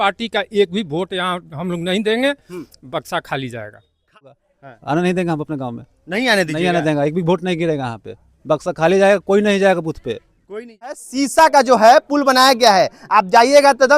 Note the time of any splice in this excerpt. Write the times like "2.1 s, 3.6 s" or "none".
4.3 s, 10.9 s